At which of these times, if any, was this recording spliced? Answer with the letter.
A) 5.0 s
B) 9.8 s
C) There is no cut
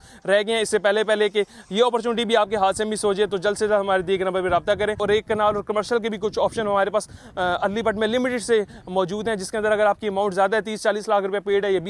A